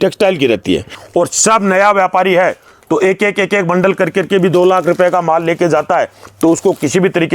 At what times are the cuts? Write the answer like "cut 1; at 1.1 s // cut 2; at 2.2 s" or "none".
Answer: cut 1; at 1.0 s